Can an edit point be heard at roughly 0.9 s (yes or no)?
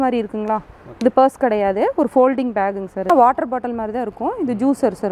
no